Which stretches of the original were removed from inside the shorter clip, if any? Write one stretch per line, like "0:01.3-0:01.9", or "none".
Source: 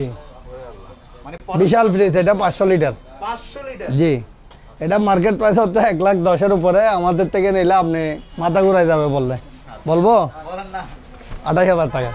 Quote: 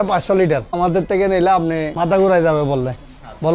0:03.1-0:07.0
0:08.1-0:08.3